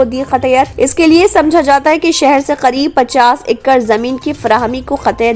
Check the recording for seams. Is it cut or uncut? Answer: uncut